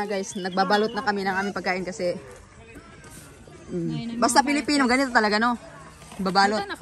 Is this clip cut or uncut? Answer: uncut